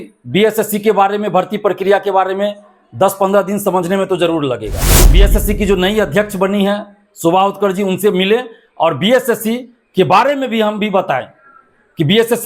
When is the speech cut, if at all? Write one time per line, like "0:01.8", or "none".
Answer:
0:05.1